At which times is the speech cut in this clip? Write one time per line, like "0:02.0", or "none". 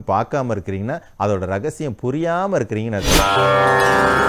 0:03.2

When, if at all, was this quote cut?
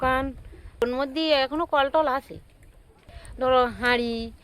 0:00.8
0:03.0

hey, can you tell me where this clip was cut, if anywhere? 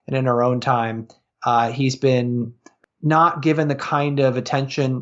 0:02.6

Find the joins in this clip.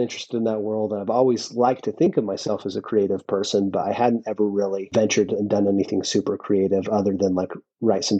0:04.9

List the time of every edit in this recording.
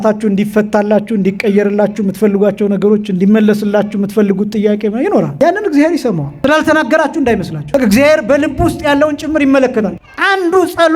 0:05.3
0:06.3
0:07.6
0:10.0

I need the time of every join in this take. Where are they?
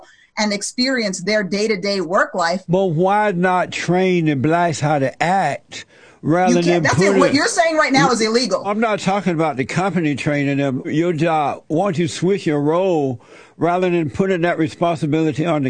0:02.6
0:08.7
0:10.9

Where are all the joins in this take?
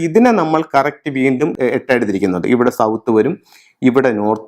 0:01.5

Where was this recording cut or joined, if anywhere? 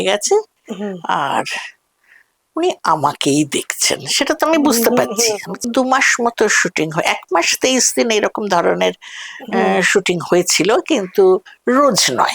0:05.5

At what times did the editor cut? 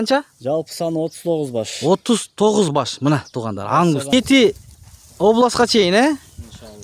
0:04.1

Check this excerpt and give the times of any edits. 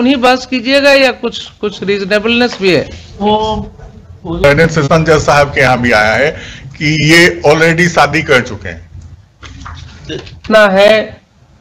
0:04.4
0:10.4

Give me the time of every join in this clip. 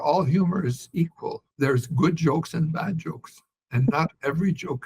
0:01.4

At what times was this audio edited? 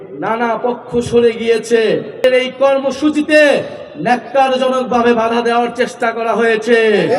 0:02.2

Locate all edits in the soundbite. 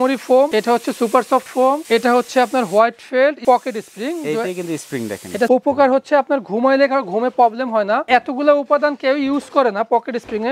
0:03.4
0:05.5
0:08.0

